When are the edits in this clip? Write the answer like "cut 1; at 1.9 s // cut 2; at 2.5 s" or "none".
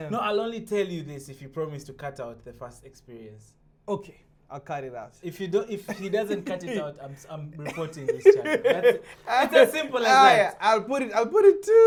none